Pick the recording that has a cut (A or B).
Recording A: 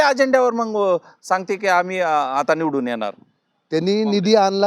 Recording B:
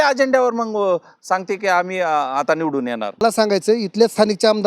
B